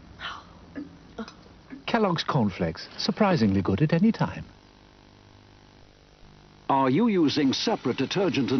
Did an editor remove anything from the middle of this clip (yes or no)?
yes